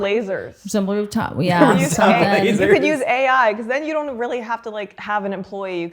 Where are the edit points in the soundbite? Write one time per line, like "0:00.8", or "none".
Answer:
0:05.0